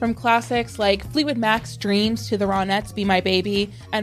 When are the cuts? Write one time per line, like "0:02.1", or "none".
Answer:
none